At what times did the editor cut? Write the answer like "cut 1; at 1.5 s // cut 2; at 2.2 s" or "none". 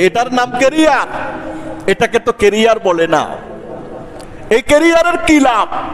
none